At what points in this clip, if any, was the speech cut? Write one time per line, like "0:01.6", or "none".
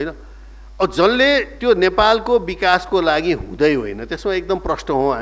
none